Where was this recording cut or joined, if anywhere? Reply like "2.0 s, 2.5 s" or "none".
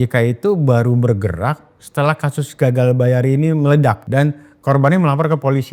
4.0 s